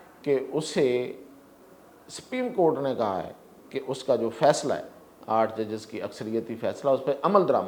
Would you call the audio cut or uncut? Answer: uncut